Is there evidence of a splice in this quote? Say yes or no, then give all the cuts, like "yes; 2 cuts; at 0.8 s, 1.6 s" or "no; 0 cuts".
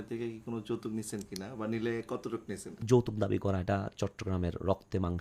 yes; 1 cut; at 2.8 s